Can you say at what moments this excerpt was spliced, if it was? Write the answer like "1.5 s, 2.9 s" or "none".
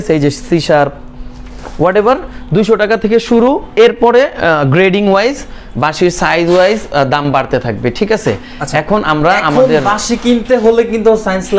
none